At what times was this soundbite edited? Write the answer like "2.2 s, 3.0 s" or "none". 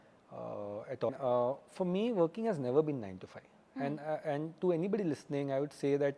1.1 s